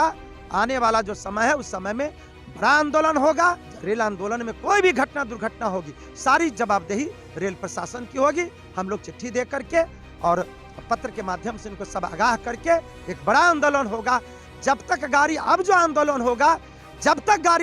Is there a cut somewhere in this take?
yes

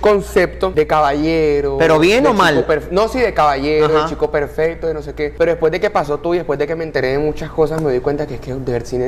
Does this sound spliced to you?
no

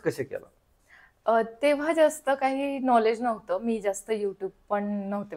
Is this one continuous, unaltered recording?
yes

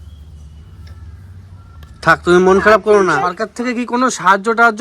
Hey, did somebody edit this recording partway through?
yes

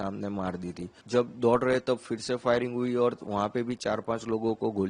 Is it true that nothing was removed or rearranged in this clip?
no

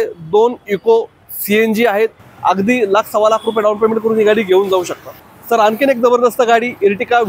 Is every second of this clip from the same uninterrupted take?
no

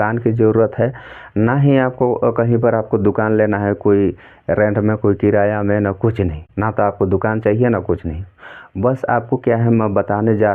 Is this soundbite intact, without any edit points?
yes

